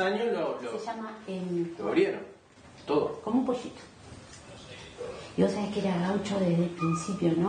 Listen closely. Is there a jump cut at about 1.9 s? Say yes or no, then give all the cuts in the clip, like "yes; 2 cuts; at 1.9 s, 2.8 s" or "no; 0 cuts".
no; 0 cuts